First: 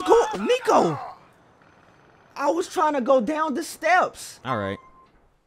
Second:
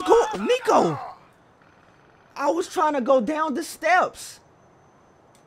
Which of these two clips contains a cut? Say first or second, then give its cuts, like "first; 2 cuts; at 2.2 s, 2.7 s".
first; 1 cut; at 4.3 s